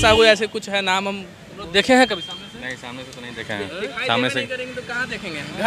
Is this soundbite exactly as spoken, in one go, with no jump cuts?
yes; 0 cuts

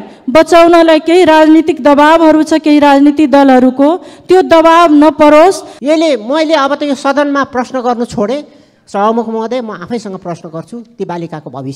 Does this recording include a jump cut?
yes; 1 cut; at 5.7 s

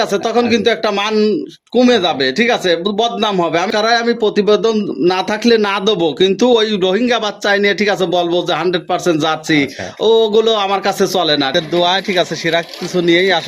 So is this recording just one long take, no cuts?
no; 2 cuts; at 3.7 s, 11.5 s

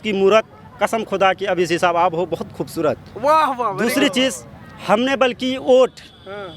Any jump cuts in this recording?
no; 0 cuts

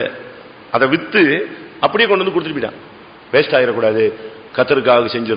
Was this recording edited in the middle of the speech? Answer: no; 0 cuts

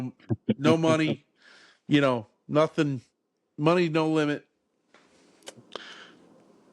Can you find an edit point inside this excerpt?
no; 0 cuts

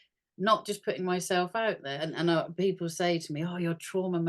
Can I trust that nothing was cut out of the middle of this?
no; 1 cut; at 1.9 s

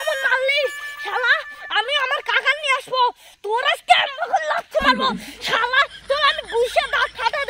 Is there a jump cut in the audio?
no; 0 cuts

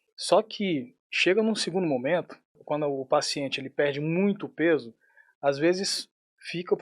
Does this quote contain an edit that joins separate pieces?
yes; 1 cut; at 2.6 s

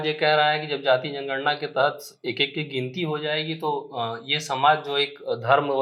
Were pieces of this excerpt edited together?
no; 0 cuts

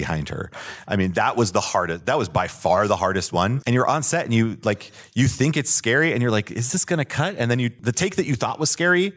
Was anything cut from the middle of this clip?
yes; 2 cuts; at 3.6 s, 7.8 s

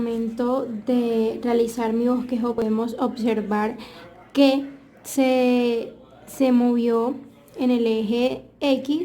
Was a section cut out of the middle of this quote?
yes; 1 cut; at 2.6 s

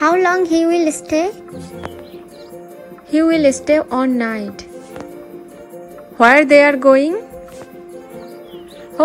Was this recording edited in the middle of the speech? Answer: yes; 3 cuts; at 2.8 s, 5.5 s, 8.3 s

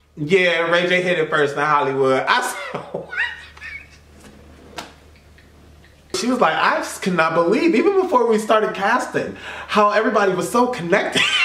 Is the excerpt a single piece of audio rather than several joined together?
no; 1 cut; at 6.2 s

